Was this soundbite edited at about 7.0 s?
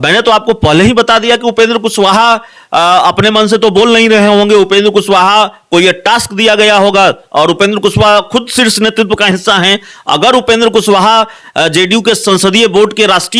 no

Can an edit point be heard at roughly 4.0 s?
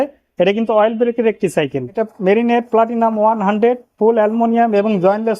no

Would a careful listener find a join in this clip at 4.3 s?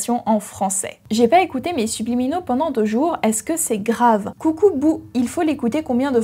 yes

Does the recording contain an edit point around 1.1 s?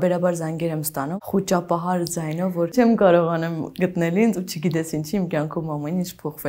yes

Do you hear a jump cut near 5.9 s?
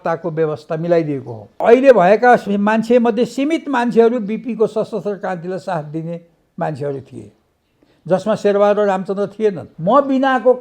no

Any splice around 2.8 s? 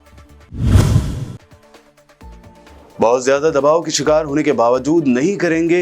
no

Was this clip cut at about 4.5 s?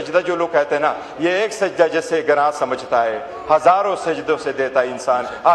no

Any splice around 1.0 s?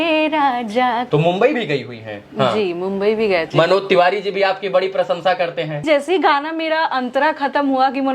yes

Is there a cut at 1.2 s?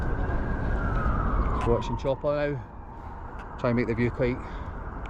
no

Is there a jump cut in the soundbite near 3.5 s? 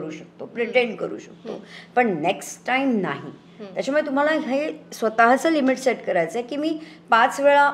no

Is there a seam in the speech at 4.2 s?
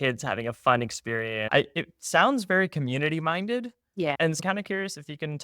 yes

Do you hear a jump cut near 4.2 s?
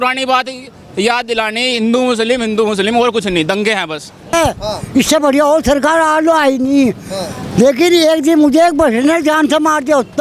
yes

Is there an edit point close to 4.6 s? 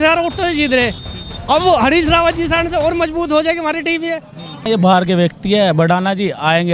yes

